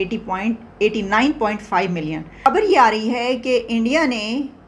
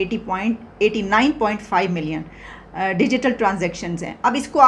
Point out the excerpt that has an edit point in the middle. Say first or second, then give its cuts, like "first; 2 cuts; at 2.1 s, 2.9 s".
first; 1 cut; at 2.5 s